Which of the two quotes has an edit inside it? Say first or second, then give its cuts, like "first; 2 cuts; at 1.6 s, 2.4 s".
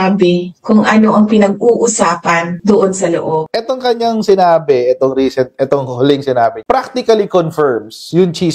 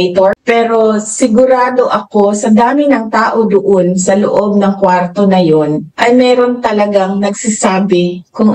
first; 1 cut; at 3.4 s